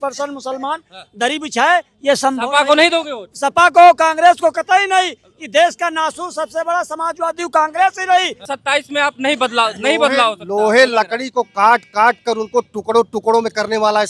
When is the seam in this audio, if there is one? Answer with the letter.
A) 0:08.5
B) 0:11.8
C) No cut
A